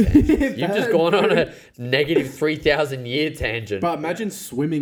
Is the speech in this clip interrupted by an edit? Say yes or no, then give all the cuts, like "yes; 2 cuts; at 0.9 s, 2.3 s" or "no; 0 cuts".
no; 0 cuts